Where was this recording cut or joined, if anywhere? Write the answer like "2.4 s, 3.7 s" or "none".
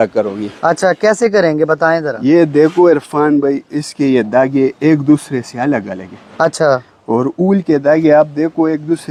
none